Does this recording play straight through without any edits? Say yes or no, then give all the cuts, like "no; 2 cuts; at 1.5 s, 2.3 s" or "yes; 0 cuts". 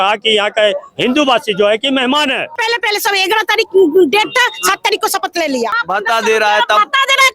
no; 2 cuts; at 2.5 s, 5.8 s